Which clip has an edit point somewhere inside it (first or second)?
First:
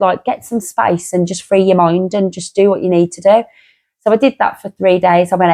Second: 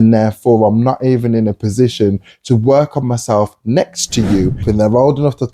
second